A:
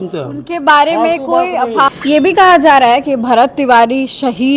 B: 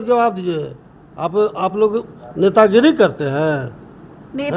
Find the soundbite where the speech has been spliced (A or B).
A